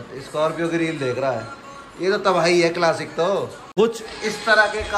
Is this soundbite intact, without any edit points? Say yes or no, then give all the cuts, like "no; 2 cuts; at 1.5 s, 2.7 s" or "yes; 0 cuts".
no; 1 cut; at 3.6 s